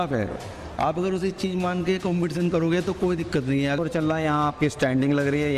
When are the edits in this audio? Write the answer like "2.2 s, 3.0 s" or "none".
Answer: 3.8 s